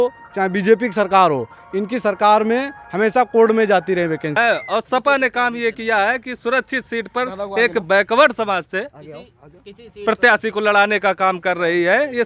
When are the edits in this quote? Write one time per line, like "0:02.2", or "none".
0:04.3